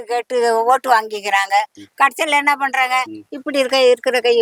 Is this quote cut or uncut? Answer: uncut